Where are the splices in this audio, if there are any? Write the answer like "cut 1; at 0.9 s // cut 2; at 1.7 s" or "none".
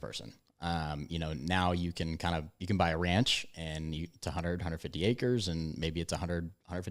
none

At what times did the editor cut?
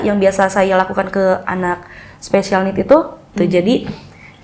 cut 1; at 3.2 s

